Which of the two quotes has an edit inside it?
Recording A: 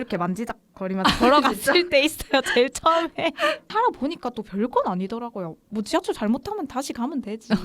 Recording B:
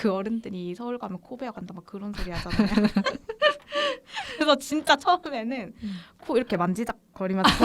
A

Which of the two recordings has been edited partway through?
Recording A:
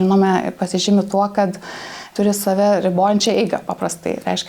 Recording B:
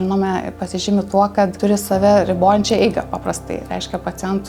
B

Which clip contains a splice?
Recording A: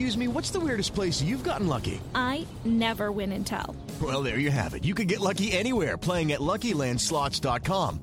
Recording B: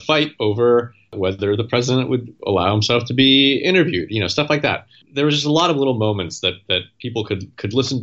B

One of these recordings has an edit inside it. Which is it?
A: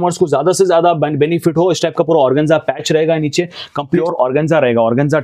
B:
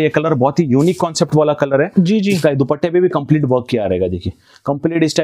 A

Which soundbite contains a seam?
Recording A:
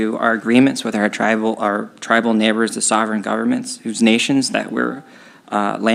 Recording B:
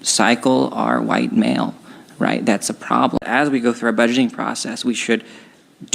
B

